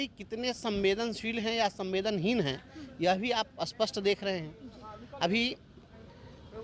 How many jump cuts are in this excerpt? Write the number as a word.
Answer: zero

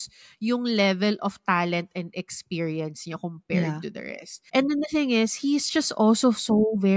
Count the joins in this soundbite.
one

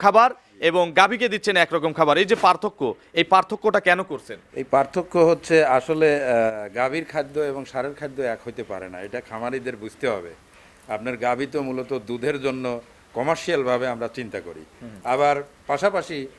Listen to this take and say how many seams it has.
zero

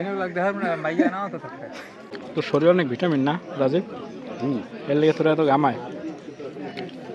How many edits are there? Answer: one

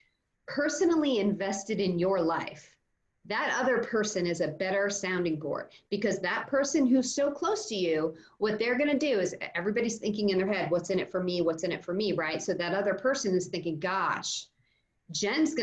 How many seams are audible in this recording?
zero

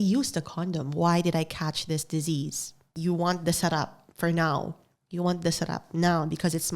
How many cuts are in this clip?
one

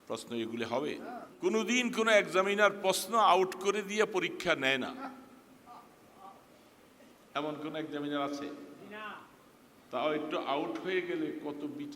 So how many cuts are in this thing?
one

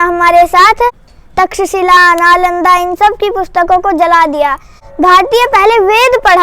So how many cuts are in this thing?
two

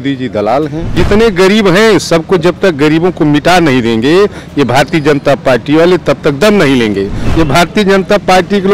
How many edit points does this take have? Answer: two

